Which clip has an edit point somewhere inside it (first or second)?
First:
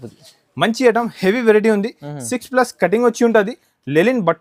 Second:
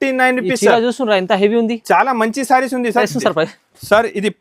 second